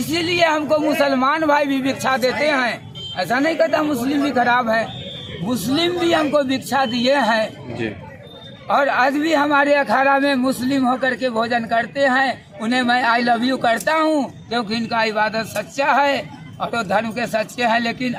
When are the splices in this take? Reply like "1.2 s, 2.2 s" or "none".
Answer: none